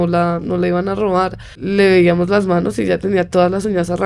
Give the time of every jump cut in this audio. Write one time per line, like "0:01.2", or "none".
0:01.6